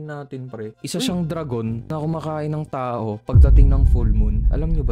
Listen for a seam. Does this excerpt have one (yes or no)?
no